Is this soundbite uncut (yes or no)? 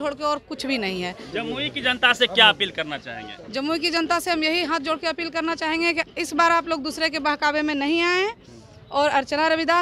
yes